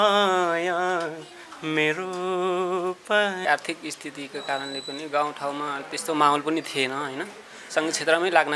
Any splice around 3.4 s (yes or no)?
yes